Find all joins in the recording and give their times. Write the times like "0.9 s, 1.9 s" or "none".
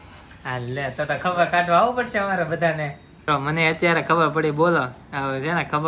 3.3 s